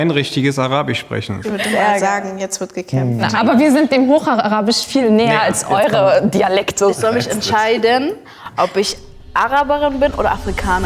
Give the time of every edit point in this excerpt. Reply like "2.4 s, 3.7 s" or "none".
1.4 s, 3.3 s, 6.9 s

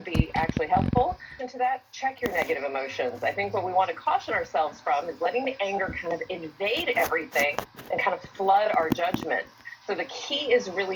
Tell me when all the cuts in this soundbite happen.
1.3 s

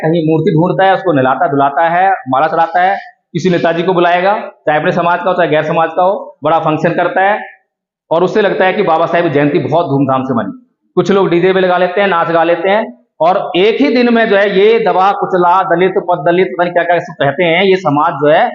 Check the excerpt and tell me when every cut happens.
none

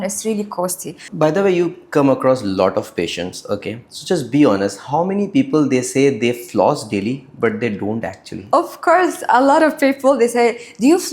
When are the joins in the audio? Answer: 1.0 s

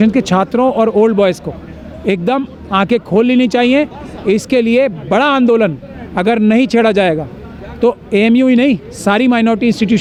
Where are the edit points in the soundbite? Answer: none

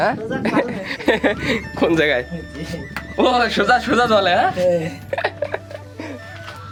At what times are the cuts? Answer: none

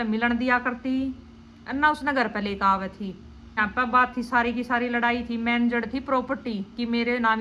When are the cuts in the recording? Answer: 3.6 s

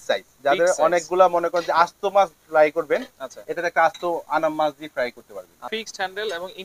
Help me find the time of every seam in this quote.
5.5 s

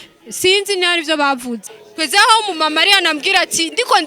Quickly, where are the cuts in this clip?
1.7 s

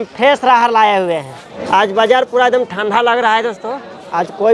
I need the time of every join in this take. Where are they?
1.6 s

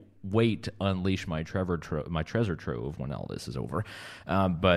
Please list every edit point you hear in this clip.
none

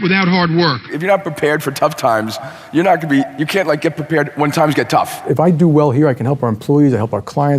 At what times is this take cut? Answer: 0.9 s, 5.3 s

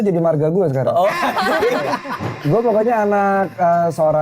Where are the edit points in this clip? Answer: 2.3 s

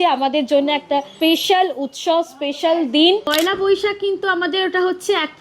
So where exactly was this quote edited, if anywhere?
1.1 s, 3.3 s

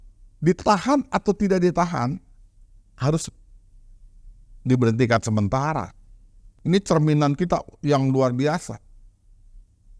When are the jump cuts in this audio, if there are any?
6.5 s

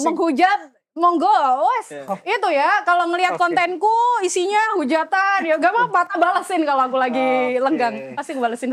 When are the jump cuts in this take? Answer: none

